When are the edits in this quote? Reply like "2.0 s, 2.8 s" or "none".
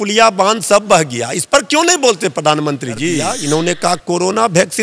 3.3 s